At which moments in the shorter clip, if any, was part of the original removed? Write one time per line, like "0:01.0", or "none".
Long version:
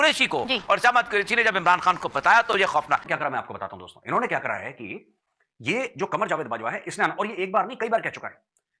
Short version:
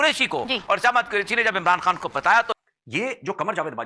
0:02.5